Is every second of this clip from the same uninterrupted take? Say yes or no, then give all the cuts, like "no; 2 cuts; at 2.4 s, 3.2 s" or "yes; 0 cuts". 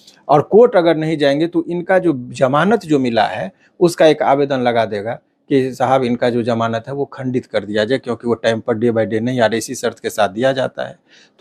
yes; 0 cuts